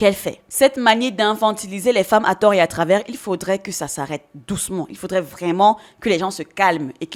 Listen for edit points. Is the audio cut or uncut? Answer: uncut